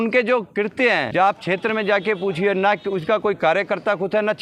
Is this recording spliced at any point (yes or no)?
yes